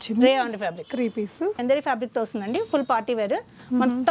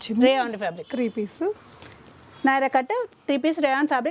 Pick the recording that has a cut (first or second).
first